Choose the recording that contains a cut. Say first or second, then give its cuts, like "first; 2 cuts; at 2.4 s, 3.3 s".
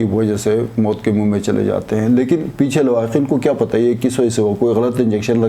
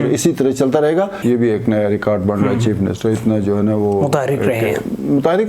second; 1 cut; at 1.2 s